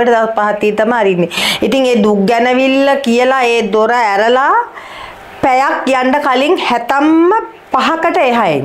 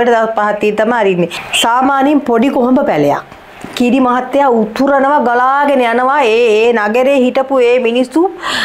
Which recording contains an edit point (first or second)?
second